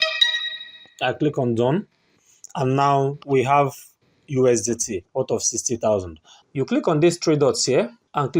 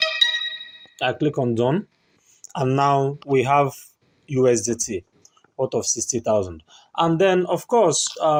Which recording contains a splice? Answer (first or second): first